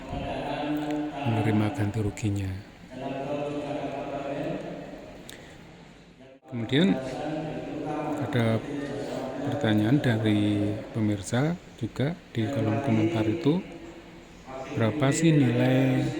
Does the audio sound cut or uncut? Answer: cut